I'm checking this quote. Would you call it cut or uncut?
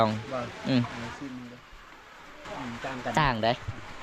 cut